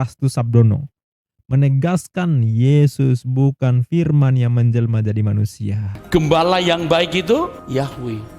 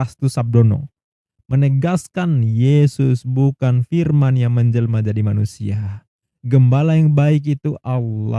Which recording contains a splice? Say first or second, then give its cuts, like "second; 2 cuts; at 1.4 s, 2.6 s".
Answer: first; 1 cut; at 5.9 s